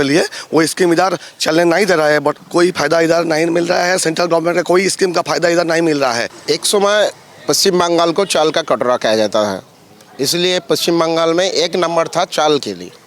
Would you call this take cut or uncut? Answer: cut